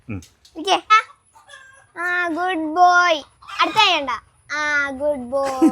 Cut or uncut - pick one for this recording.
cut